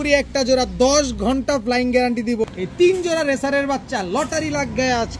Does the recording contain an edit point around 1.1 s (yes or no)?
no